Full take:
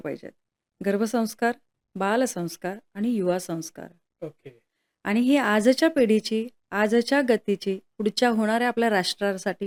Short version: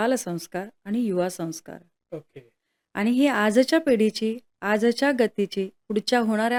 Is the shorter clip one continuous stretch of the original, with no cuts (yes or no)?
yes